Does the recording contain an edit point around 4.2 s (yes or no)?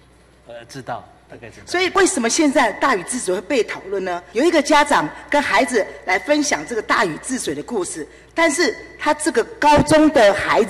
yes